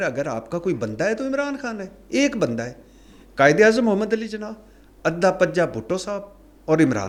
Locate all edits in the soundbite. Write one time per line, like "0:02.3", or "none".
none